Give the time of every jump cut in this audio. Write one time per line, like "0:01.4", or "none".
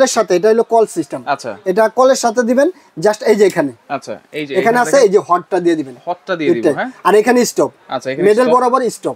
none